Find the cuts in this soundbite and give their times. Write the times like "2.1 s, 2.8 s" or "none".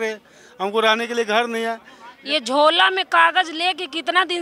none